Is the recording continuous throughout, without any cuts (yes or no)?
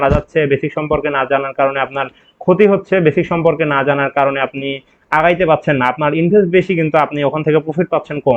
yes